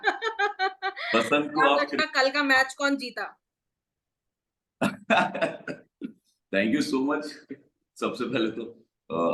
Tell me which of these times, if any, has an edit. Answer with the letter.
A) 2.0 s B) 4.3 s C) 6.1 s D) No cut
A